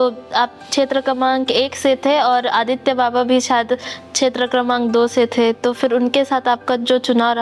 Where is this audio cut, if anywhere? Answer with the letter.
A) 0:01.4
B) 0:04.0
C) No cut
C